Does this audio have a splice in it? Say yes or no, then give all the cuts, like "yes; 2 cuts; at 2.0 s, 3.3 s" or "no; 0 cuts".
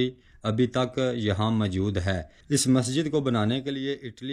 yes; 1 cut; at 2.3 s